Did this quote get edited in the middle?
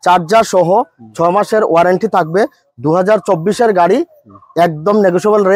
no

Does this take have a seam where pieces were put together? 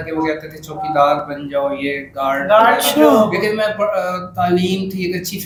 no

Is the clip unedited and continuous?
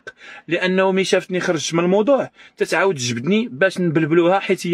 yes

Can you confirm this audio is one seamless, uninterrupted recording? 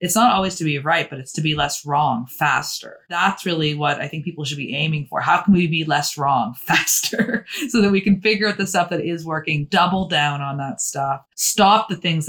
no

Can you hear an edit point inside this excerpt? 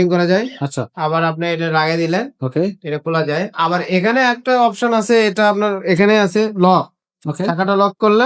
no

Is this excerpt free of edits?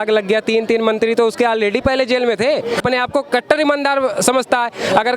no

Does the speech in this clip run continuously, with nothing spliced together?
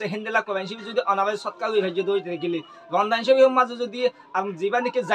yes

